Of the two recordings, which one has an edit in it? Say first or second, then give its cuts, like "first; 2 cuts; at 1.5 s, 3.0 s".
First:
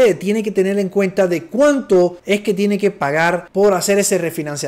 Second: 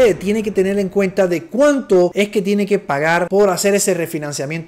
second; 2 cuts; at 2.1 s, 3.3 s